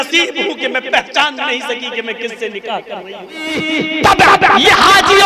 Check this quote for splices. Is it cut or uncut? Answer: cut